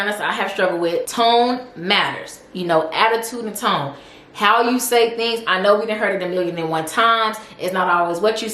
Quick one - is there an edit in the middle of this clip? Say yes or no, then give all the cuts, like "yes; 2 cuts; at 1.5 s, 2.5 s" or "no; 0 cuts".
yes; 1 cut; at 1.1 s